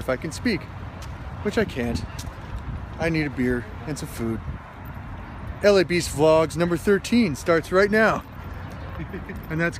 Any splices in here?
no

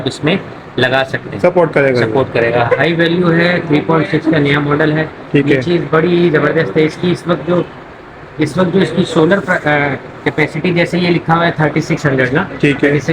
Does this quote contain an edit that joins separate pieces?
no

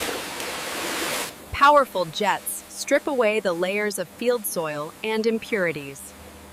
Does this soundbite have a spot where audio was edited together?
no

